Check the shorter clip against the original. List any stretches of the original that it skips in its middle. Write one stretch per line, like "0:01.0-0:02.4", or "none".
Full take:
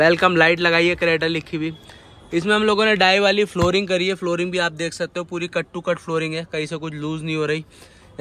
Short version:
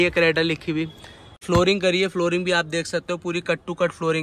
0:02.3-0:03.5